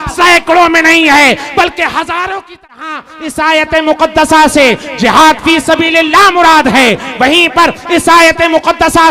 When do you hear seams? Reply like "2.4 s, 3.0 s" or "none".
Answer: 2.7 s